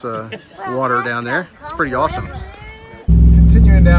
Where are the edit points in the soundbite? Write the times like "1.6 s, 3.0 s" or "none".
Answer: none